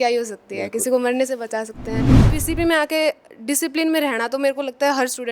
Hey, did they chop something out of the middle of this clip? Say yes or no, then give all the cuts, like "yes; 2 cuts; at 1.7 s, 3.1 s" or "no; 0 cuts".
yes; 1 cut; at 2.3 s